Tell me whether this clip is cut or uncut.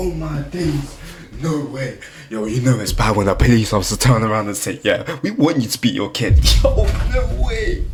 uncut